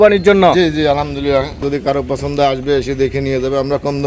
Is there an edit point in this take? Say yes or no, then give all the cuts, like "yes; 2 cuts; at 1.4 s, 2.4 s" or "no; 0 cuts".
yes; 1 cut; at 1.6 s